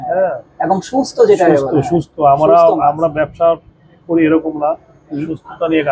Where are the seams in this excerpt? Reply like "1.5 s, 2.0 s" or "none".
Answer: none